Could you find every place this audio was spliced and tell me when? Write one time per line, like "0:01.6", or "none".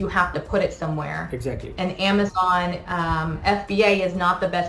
none